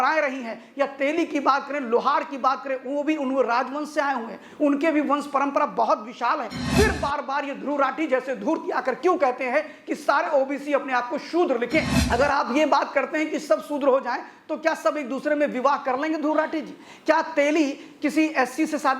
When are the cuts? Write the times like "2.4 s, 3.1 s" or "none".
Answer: 6.6 s, 12.0 s